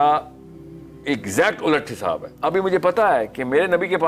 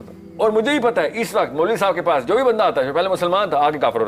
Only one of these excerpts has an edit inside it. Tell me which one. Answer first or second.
first